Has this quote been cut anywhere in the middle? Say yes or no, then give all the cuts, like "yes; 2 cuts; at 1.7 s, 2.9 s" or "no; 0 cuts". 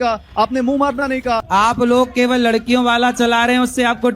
yes; 1 cut; at 1.5 s